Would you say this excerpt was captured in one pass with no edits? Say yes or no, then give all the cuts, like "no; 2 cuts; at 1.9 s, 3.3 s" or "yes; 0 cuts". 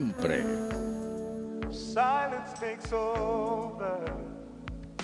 yes; 0 cuts